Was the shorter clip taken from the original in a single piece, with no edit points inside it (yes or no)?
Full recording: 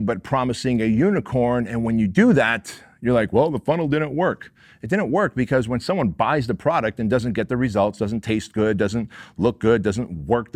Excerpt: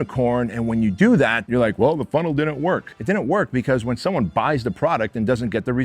no